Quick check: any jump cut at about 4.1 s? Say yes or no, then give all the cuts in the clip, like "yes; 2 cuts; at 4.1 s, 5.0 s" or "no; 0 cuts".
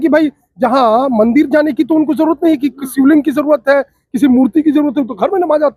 no; 0 cuts